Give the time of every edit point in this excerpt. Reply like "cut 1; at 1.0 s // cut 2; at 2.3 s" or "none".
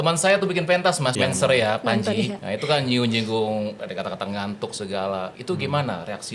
cut 1; at 1.1 s // cut 2; at 2.4 s // cut 3; at 3.8 s // cut 4; at 5.4 s